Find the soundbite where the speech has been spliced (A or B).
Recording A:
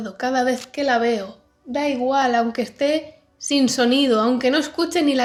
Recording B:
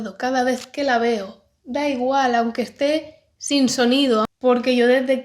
B